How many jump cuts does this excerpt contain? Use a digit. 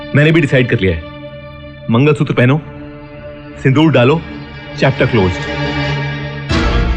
0